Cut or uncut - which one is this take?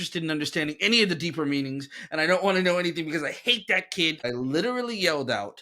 cut